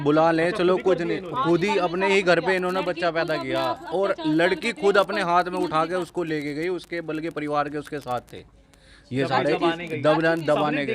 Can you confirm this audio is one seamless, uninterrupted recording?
yes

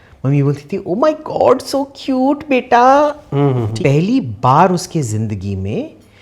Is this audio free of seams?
no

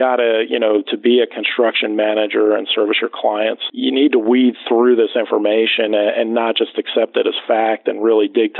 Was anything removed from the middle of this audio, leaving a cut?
no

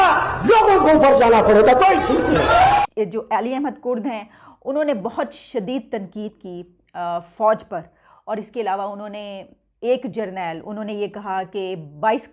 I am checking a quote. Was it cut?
yes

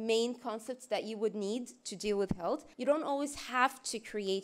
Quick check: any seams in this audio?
yes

